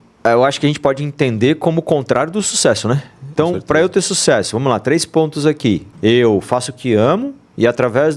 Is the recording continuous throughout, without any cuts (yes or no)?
no